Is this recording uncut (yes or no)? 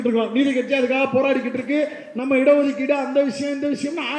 yes